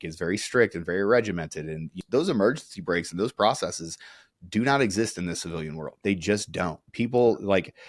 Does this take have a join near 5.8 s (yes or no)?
yes